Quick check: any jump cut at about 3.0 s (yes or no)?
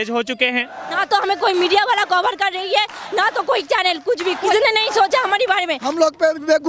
no